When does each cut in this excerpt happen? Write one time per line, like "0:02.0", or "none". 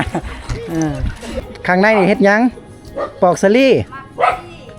0:01.5